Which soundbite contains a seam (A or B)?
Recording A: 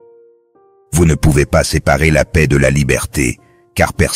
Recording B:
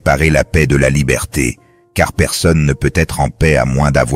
A